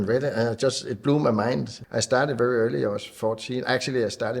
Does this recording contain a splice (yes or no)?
yes